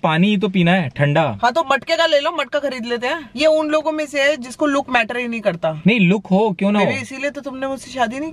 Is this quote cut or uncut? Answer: cut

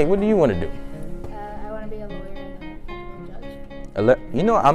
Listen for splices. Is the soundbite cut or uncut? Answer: uncut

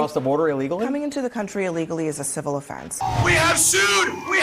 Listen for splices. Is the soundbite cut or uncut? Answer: cut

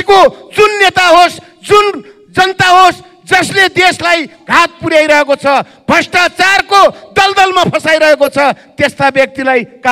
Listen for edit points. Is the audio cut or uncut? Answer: uncut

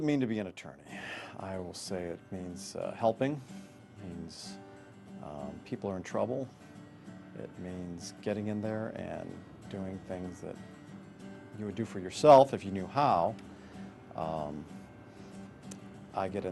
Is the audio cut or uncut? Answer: uncut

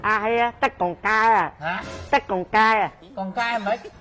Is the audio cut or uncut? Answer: uncut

